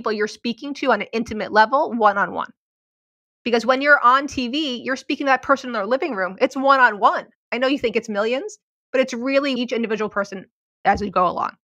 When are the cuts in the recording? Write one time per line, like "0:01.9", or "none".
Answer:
0:09.6
0:10.7

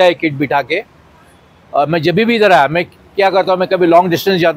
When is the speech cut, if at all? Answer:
none

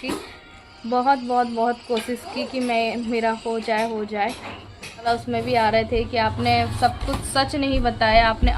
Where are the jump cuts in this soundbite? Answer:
0:05.1

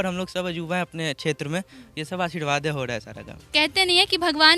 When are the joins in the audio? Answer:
0:03.4

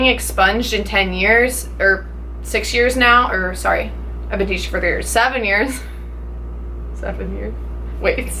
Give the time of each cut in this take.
none

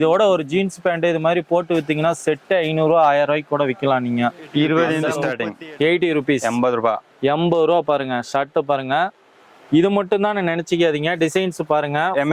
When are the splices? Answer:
0:05.3

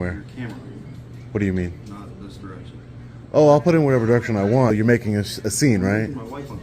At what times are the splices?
0:04.7

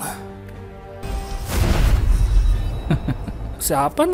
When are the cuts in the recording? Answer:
0:01.0

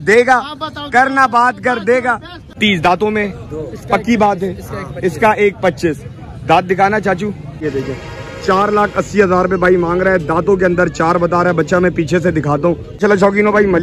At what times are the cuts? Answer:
0:02.5
0:07.6
0:12.9

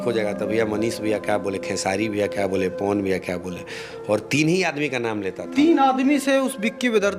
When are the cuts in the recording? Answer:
none

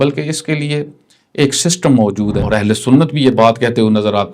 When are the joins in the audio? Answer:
0:02.4

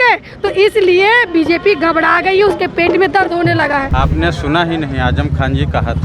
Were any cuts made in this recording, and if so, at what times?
0:03.9

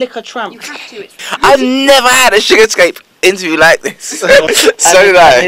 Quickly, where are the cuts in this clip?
0:01.2
0:04.5

